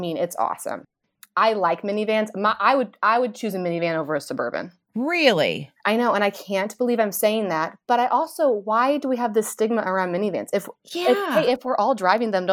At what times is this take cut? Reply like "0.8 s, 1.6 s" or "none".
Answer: none